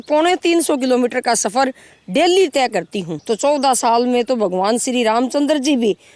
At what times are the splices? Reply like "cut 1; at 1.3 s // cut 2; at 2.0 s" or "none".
cut 1; at 3.2 s